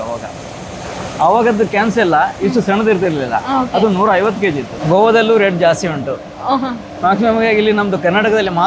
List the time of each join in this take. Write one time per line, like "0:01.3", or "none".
0:04.7